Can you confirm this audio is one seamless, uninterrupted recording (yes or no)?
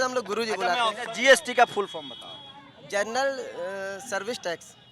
no